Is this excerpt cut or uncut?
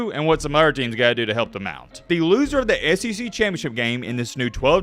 cut